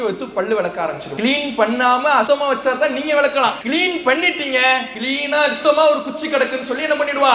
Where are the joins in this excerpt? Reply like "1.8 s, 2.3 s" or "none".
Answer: 1.1 s, 2.3 s, 3.6 s, 5.3 s